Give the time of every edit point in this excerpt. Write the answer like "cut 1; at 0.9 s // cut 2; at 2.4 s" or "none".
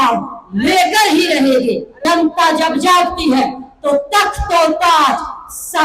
cut 1; at 1.9 s

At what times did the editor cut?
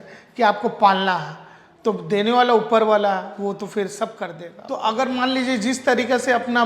cut 1; at 4.5 s

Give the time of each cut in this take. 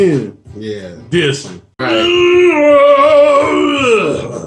cut 1; at 1.8 s

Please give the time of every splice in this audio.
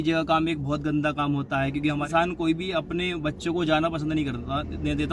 cut 1; at 2.1 s

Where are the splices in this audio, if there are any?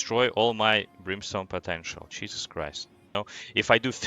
cut 1; at 3.1 s

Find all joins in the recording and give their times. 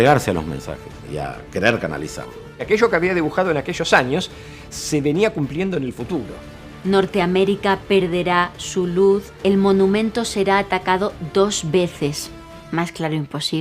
cut 1; at 1.1 s // cut 2; at 2.5 s // cut 3; at 6.7 s // cut 4; at 9.3 s

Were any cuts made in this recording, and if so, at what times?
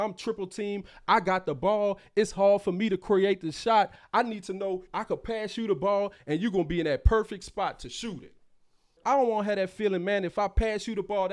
cut 1; at 9.0 s

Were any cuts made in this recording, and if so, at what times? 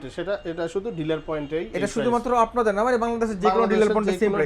none

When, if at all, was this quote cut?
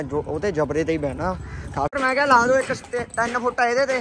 cut 1; at 1.9 s

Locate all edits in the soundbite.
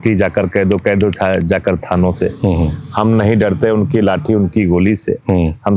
none

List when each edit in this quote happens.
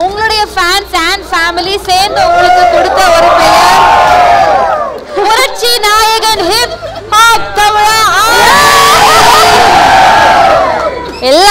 cut 1; at 5.0 s

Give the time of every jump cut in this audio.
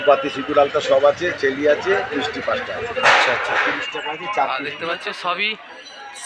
cut 1; at 5.1 s

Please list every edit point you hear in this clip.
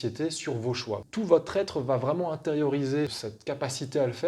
cut 1; at 1.1 s // cut 2; at 3.1 s

